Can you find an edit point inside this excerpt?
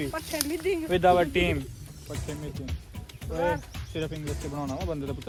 no; 0 cuts

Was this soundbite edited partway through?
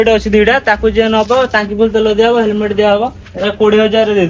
no; 0 cuts

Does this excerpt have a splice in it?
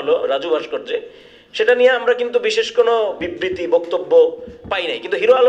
yes; 1 cut; at 3.2 s

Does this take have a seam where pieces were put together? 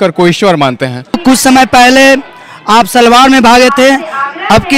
yes; 1 cut; at 1.2 s

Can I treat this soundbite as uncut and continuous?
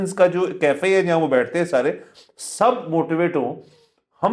yes; 0 cuts

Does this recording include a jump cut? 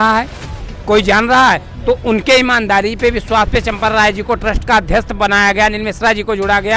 no; 0 cuts

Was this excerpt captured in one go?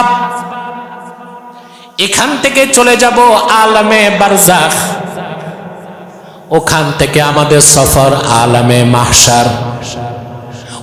yes; 0 cuts

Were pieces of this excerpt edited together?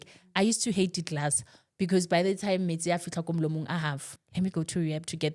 yes; 1 cut; at 4.1 s

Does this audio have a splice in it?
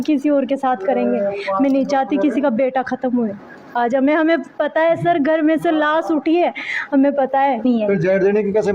yes; 1 cut; at 7.6 s

